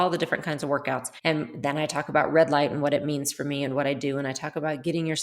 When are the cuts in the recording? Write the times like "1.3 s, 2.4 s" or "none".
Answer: 1.1 s